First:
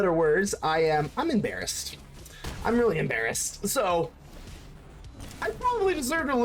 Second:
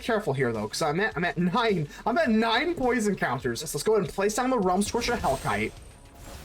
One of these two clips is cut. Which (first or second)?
second